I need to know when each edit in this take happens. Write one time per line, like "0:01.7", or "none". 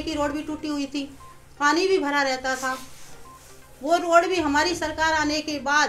none